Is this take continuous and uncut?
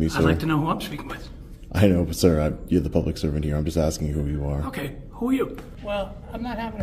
no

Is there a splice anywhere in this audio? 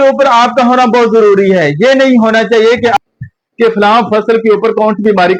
no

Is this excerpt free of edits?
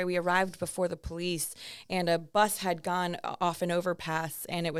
yes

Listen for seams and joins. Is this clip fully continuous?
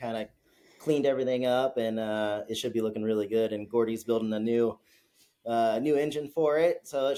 yes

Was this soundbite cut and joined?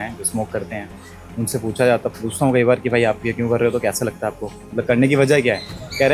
no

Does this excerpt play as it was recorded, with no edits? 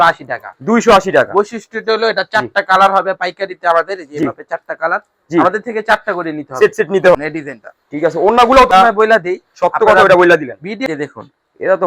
no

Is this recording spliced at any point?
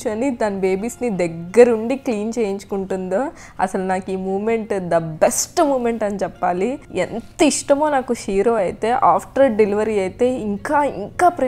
no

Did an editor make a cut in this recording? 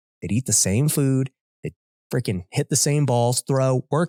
no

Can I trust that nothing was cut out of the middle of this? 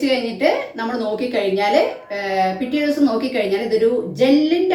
yes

